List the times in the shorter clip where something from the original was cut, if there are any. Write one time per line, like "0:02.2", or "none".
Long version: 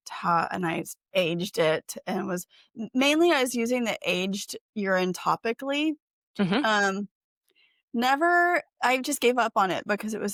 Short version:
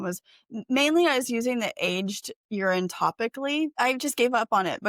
0:03.7